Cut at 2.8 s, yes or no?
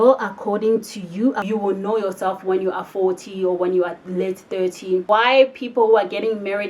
no